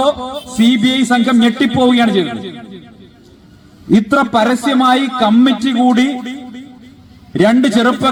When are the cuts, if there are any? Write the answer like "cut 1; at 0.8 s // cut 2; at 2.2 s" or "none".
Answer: none